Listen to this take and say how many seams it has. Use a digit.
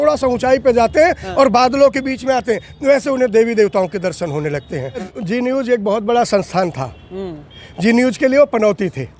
1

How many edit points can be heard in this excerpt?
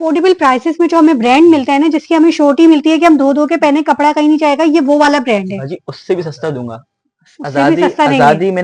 0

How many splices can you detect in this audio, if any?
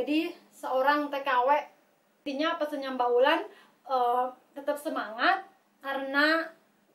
1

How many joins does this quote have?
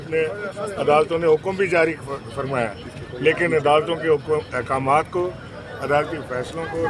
0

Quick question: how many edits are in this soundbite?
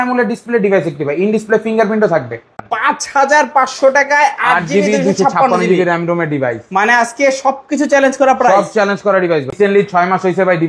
2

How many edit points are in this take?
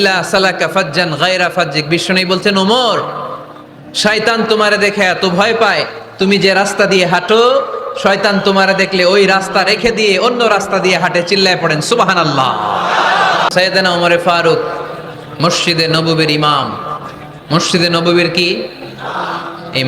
1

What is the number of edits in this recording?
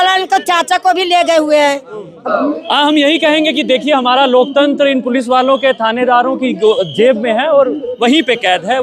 1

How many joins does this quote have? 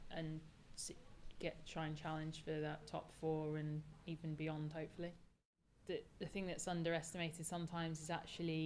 1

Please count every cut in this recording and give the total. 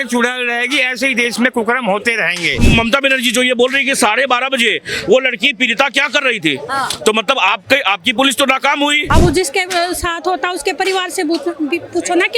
2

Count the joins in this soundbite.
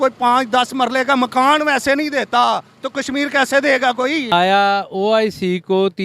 1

